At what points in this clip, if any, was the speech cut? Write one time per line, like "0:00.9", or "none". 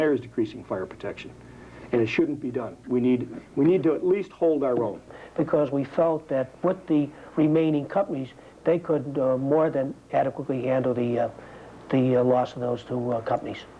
0:05.2